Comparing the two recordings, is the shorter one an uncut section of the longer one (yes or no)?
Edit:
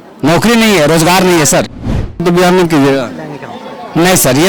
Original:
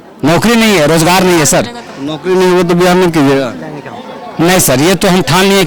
no